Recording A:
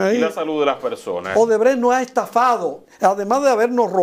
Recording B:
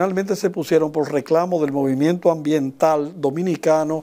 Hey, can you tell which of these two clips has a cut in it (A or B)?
A